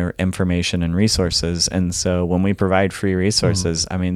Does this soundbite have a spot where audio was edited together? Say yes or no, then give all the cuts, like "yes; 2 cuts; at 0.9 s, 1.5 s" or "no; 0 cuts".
no; 0 cuts